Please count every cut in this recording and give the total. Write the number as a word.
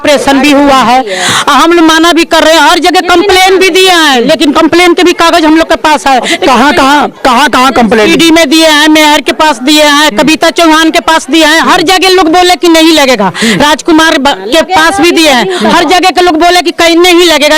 zero